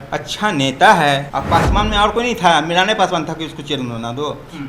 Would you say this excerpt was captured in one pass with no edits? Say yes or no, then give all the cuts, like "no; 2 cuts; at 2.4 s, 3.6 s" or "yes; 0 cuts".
no; 1 cut; at 1.3 s